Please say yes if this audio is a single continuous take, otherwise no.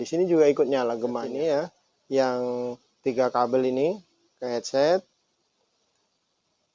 no